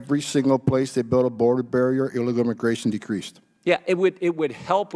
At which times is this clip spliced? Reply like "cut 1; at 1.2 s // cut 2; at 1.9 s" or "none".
none

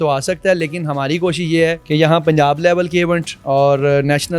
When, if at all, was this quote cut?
cut 1; at 1.8 s

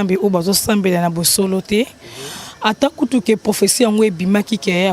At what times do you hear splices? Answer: none

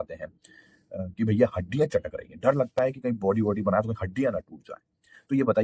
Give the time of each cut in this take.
none

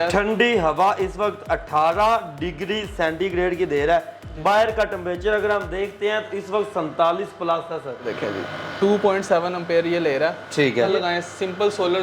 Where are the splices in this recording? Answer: cut 1; at 8.1 s // cut 2; at 10.9 s

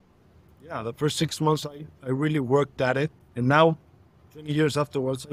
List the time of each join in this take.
cut 1; at 3.2 s

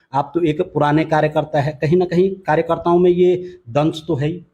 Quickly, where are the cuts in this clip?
none

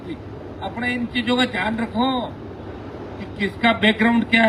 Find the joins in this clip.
none

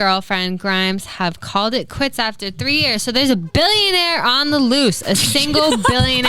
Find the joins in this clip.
none

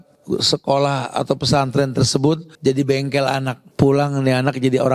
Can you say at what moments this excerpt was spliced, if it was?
cut 1; at 2.5 s // cut 2; at 3.6 s

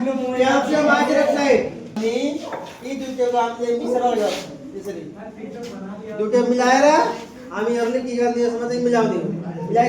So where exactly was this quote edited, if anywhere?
cut 1; at 2.0 s

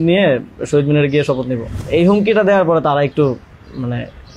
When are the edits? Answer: cut 1; at 1.8 s

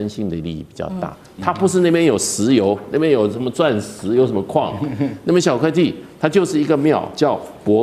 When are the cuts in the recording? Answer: none

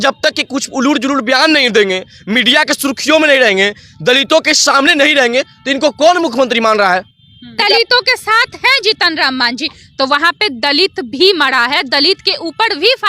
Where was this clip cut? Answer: cut 1; at 7.6 s

